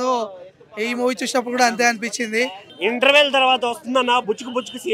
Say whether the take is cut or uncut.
cut